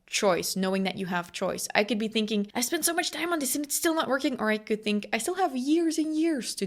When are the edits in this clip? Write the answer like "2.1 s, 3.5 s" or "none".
2.5 s